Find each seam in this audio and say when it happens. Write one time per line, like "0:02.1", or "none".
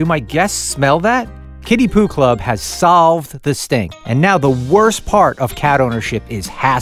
none